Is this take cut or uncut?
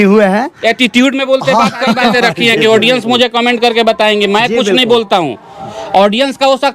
cut